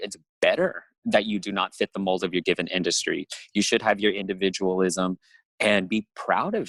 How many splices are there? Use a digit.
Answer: 0